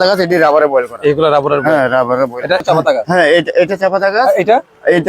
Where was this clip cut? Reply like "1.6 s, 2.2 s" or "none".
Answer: 2.6 s